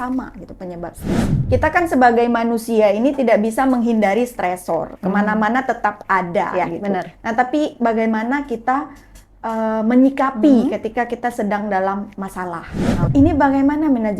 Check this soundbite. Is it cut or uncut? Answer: cut